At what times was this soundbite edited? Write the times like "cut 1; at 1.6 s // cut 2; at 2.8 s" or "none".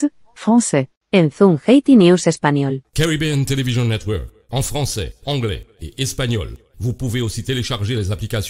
cut 1; at 1.0 s // cut 2; at 2.7 s